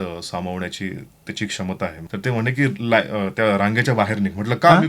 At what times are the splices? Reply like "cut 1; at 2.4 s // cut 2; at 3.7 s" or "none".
cut 1; at 2.0 s